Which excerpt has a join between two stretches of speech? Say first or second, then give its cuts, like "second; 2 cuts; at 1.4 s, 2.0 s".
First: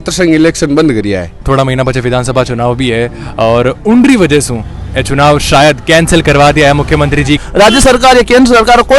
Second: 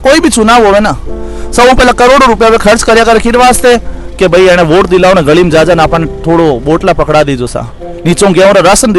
first; 2 cuts; at 1.4 s, 7.4 s